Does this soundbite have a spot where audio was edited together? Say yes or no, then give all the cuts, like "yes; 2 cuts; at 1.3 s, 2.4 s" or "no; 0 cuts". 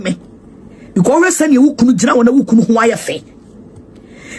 no; 0 cuts